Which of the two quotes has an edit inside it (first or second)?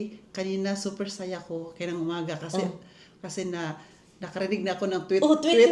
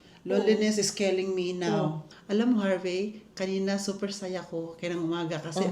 second